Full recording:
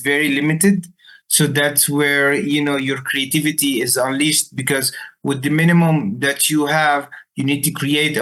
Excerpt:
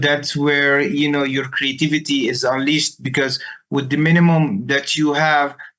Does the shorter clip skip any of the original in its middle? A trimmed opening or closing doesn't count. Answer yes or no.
no